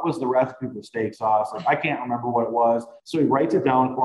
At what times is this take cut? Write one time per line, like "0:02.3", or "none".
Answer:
0:03.0